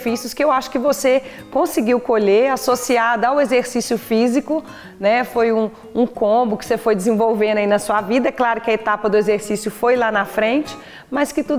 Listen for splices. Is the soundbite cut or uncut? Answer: uncut